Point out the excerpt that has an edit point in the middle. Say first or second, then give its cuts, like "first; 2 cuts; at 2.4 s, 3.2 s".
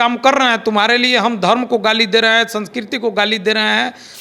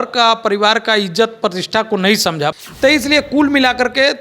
second; 1 cut; at 2.5 s